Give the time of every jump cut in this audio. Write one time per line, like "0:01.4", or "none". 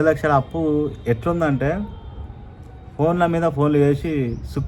none